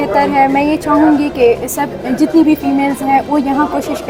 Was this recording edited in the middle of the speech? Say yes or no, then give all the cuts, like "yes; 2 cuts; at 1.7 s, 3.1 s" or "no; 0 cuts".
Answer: no; 0 cuts